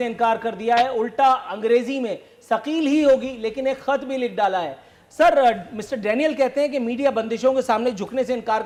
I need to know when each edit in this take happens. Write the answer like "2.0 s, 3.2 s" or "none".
none

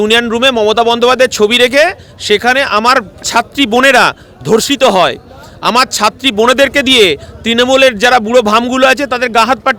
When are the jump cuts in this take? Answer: none

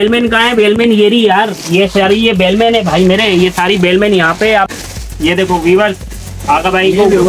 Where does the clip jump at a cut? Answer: 4.7 s

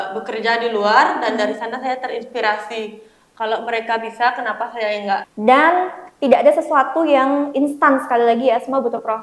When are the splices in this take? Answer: 5.3 s

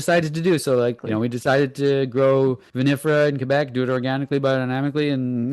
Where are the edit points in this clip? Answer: 1.0 s, 2.7 s

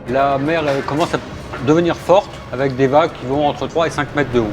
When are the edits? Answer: 2.4 s, 3.6 s

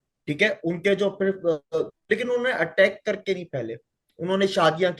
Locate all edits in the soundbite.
2.0 s

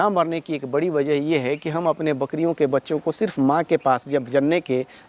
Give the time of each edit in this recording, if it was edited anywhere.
none

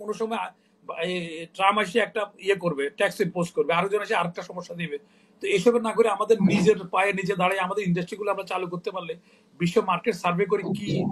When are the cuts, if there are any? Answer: none

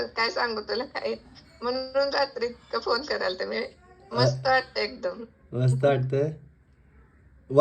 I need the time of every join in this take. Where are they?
none

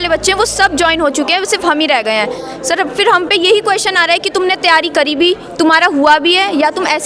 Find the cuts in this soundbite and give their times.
none

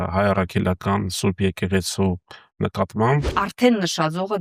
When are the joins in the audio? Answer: 3.3 s

